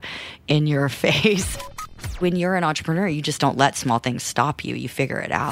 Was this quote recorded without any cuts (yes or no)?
no